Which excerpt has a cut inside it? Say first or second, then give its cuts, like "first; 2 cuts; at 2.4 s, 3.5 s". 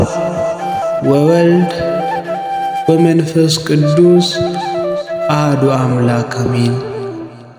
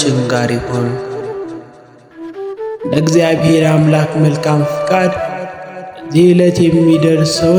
second; 2 cuts; at 0.9 s, 2.9 s